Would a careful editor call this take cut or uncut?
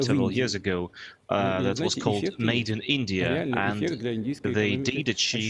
uncut